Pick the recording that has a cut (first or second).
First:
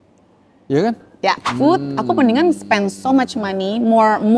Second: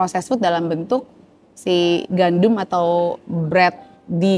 first